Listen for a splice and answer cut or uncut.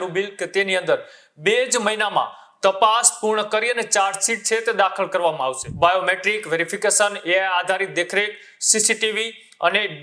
cut